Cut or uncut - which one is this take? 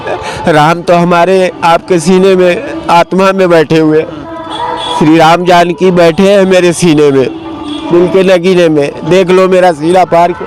uncut